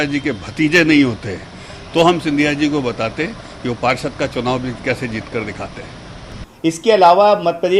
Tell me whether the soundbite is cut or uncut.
cut